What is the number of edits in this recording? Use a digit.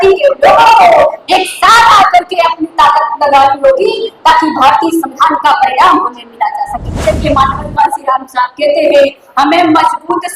1